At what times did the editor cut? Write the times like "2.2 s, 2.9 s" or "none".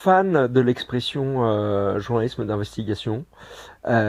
none